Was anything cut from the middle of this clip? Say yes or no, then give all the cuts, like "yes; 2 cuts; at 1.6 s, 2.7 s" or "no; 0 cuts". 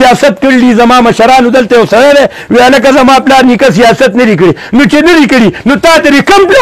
no; 0 cuts